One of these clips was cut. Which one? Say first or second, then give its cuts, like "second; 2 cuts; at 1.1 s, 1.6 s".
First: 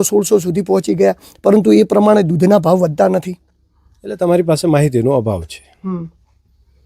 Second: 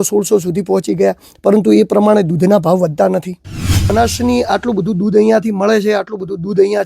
second; 1 cut; at 3.9 s